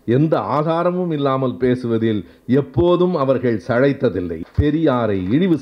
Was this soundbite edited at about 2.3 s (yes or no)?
no